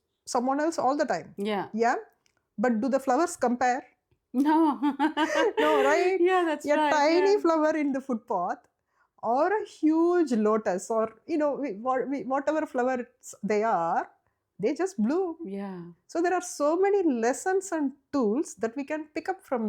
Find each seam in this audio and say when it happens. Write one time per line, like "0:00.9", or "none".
none